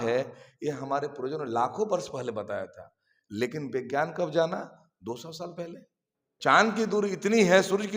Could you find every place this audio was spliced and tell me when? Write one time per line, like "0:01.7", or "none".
0:06.3